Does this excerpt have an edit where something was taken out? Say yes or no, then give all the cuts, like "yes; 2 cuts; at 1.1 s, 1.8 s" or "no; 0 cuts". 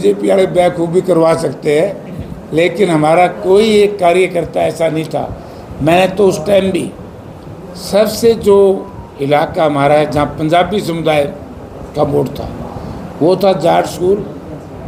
no; 0 cuts